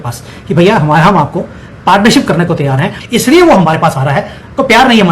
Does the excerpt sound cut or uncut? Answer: cut